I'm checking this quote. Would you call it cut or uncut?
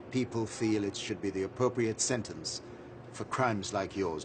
uncut